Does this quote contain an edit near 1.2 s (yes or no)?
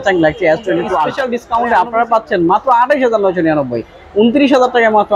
yes